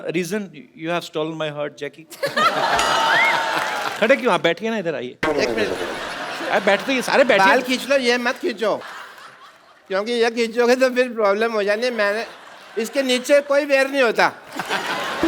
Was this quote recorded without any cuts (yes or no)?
no